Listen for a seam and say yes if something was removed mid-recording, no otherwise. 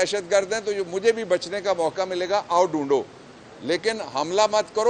no